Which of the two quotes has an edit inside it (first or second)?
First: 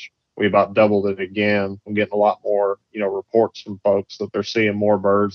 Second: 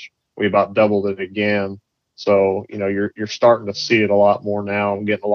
first